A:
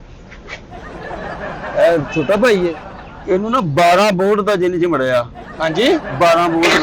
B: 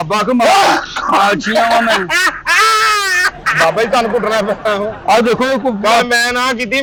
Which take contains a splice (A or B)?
A